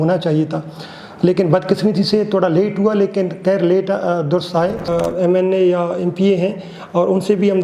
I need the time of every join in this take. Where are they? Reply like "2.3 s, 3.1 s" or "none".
4.9 s